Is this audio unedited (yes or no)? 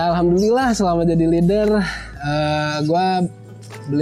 yes